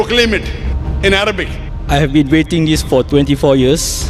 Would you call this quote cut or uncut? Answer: uncut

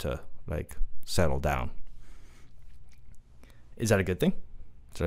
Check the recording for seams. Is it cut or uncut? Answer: uncut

